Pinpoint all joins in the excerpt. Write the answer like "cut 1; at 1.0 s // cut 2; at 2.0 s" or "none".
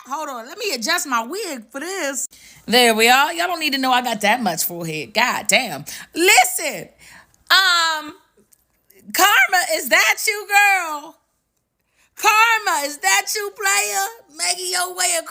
none